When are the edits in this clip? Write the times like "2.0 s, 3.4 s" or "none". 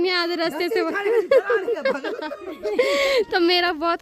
none

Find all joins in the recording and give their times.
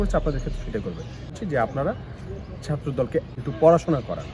1.2 s, 3.4 s

